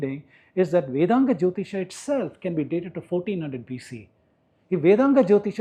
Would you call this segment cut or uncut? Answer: uncut